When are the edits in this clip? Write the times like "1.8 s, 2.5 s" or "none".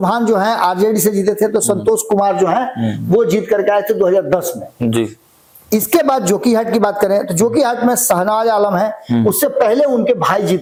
none